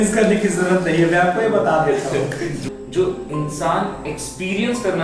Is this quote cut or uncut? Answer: cut